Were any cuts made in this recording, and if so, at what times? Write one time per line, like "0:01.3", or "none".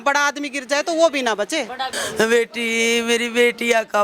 0:02.0